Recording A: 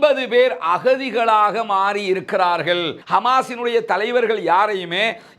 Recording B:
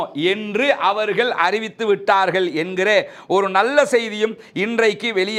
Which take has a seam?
A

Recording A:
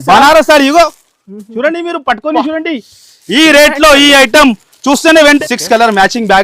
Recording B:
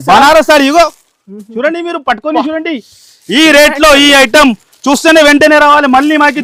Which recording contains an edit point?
A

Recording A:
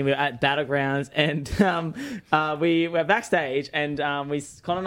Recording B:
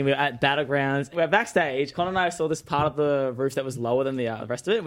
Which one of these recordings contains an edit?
B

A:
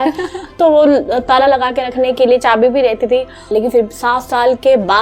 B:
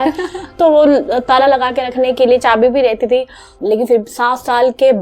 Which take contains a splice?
A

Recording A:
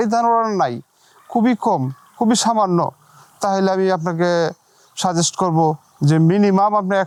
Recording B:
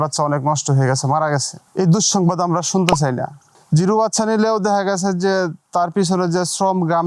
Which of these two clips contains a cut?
B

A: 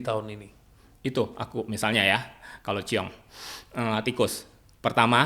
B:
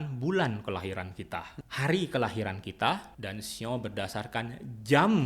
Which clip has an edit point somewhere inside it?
B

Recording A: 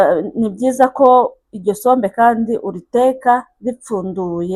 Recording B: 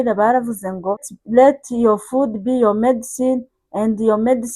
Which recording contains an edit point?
B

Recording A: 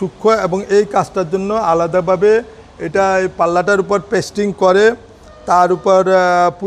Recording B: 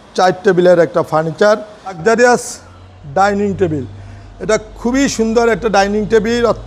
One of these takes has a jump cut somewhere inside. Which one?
B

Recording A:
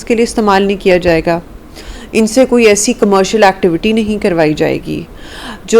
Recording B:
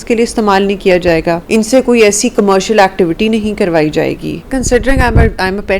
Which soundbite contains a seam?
B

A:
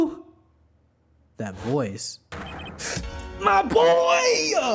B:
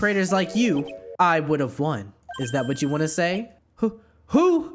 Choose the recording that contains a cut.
B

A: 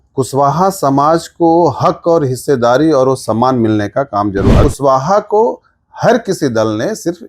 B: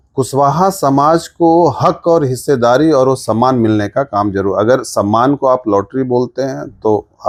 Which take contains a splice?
A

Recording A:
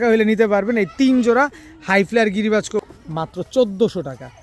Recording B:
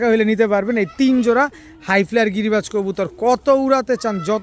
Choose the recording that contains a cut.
A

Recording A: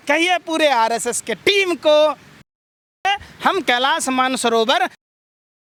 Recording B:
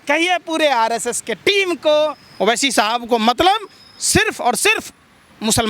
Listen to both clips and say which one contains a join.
B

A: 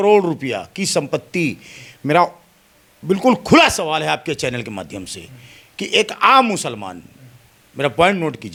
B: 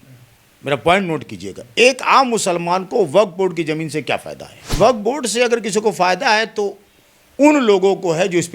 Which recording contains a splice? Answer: B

